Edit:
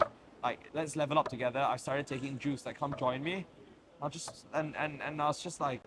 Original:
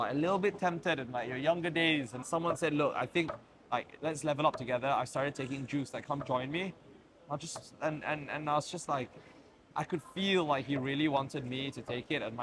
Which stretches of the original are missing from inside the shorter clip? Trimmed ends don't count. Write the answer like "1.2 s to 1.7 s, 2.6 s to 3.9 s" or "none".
none